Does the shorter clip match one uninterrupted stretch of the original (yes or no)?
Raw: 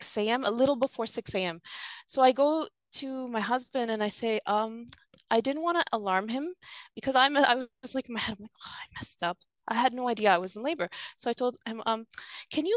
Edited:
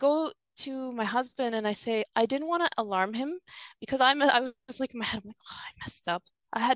no